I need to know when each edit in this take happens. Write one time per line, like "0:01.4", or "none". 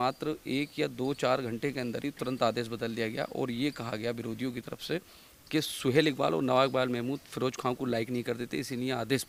none